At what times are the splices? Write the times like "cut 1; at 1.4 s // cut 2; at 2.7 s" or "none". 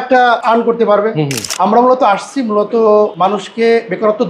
cut 1; at 1.4 s // cut 2; at 3.1 s